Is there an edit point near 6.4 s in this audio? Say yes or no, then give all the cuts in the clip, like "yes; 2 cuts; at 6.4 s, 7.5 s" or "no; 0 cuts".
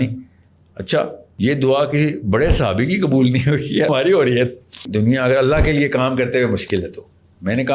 no; 3 cuts; at 1.2 s, 3.9 s, 4.9 s